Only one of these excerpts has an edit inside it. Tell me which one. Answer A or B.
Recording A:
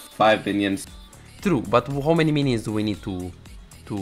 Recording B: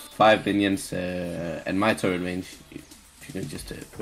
A